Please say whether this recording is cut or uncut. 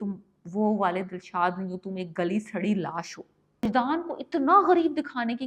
cut